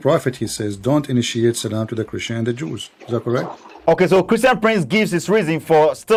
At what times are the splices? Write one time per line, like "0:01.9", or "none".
none